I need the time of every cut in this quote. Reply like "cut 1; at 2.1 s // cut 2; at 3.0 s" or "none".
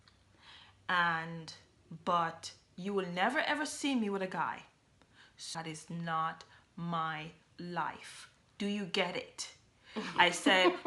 cut 1; at 5.5 s